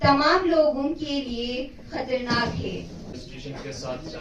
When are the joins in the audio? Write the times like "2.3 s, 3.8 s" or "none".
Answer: 3.1 s